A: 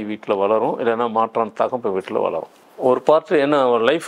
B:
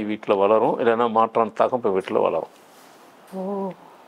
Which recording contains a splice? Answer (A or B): A